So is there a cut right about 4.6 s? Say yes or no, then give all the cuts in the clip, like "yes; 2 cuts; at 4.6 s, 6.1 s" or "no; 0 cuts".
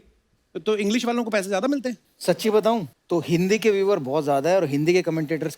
no; 2 cuts; at 2.1 s, 2.9 s